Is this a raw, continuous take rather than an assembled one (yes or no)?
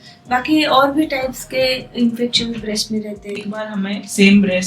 no